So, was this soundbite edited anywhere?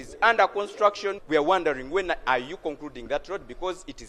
yes; 1 cut; at 1.2 s

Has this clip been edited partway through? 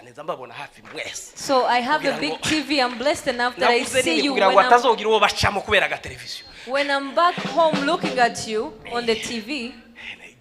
no; 0 cuts

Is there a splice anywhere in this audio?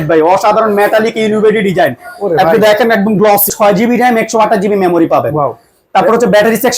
yes; 1 cut; at 3.5 s

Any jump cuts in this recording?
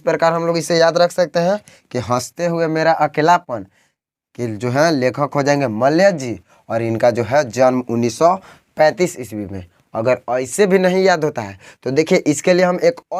no; 0 cuts

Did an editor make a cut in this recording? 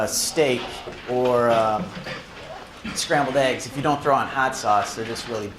yes; 1 cut; at 1.9 s

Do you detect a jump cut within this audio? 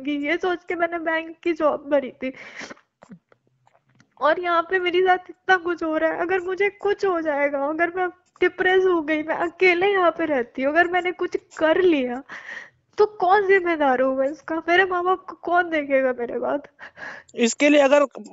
no; 0 cuts

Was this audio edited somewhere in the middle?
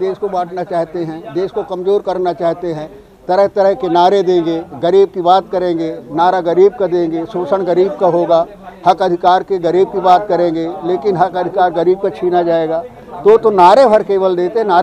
no; 0 cuts

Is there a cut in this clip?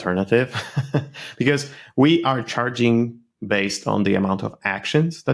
no; 0 cuts

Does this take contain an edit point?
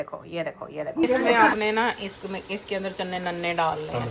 yes; 1 cut; at 1.3 s

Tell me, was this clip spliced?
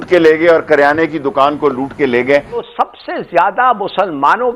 yes; 1 cut; at 2.7 s

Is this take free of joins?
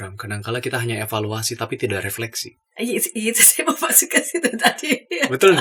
yes; 0 cuts

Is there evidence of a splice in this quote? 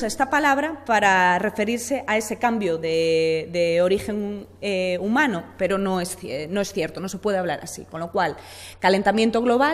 yes; 1 cut; at 6.7 s

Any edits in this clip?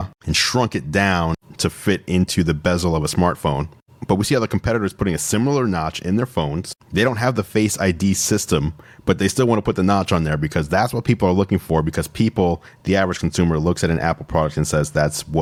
no; 0 cuts

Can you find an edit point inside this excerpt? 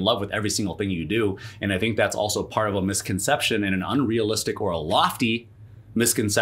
no; 0 cuts

